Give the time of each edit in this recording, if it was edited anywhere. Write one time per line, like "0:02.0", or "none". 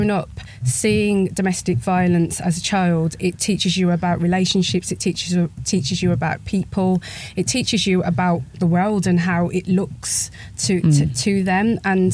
none